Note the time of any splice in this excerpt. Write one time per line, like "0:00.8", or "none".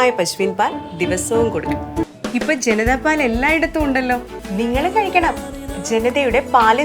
0:02.1
0:04.4